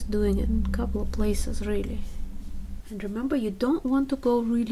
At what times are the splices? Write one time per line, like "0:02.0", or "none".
0:02.8